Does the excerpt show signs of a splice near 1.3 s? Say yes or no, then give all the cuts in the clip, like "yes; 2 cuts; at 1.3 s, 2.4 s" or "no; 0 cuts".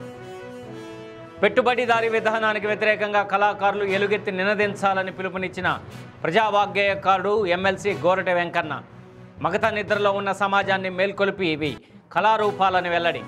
yes; 1 cut; at 1.3 s